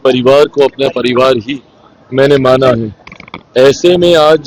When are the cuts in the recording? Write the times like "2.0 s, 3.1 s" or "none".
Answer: none